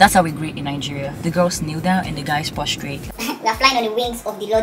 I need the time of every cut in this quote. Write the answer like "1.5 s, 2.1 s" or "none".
3.1 s